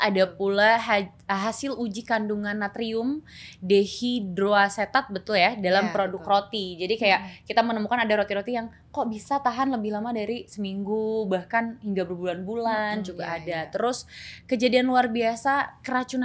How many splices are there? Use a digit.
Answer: 0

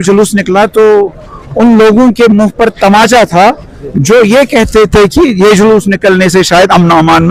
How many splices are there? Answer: 0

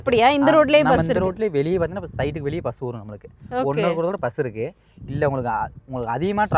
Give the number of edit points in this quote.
0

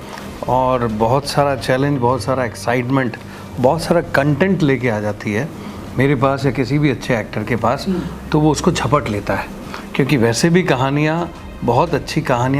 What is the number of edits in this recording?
0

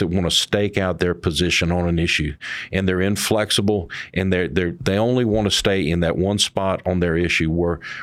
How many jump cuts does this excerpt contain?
1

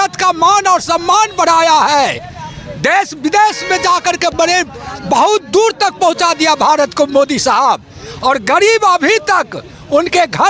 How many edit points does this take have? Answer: 0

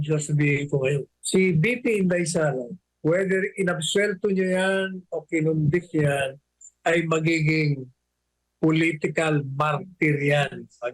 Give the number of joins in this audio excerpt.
2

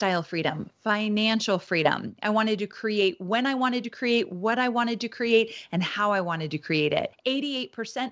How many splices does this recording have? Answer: 1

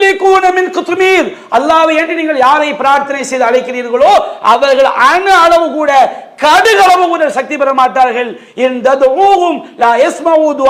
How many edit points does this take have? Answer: 0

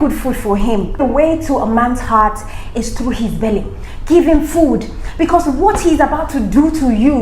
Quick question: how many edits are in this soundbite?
1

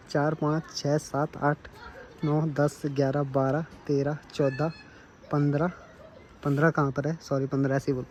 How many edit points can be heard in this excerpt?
0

